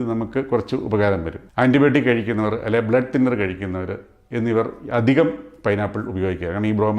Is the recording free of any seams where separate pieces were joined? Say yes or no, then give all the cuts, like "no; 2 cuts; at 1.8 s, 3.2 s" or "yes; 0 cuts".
no; 1 cut; at 1.4 s